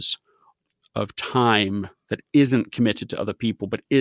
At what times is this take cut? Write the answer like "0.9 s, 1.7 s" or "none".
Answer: none